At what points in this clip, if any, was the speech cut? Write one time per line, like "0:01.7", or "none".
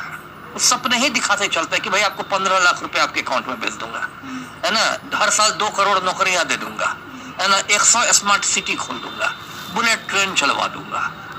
none

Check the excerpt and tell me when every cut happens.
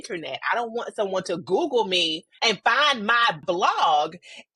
0:02.2

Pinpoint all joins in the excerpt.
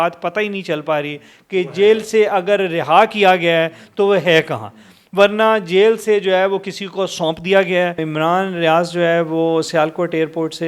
0:08.0

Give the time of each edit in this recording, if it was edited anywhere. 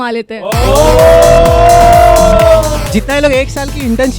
0:02.9

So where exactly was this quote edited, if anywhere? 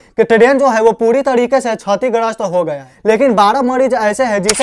0:02.9

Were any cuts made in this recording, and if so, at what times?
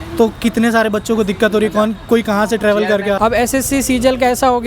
0:03.2

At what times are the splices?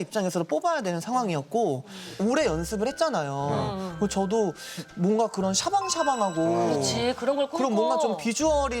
0:02.1

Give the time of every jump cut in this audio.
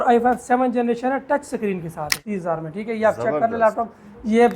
0:02.2

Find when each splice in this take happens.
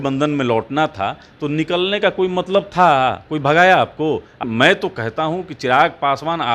0:04.4

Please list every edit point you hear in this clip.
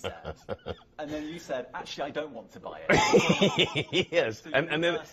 none

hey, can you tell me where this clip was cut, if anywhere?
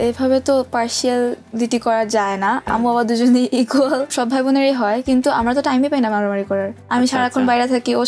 0:02.6
0:04.1
0:06.8

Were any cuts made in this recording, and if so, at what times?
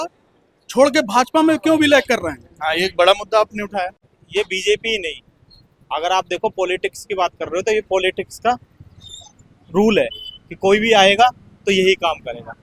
0:04.1

